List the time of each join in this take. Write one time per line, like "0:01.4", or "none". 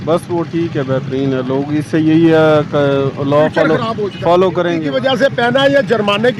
0:04.8

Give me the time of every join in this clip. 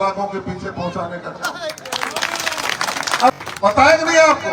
0:03.3

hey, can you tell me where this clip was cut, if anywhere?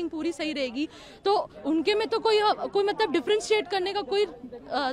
none

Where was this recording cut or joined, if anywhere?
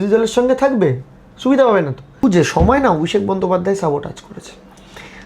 0:01.9

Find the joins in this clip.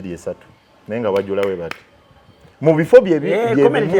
none

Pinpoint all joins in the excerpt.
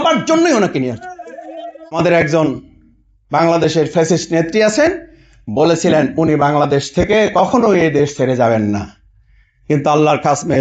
0:02.0

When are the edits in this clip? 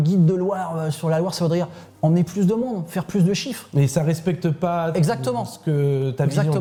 none

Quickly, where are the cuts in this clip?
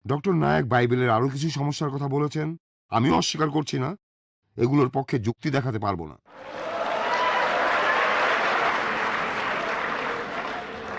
0:06.5
0:08.7

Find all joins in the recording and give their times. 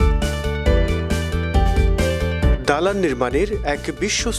none

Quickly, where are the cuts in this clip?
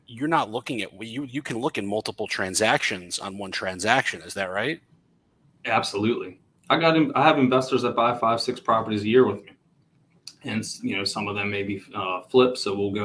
none

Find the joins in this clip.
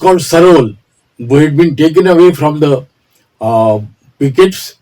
none

